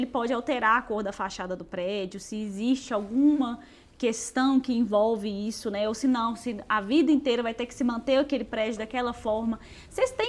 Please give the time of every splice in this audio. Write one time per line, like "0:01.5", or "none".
none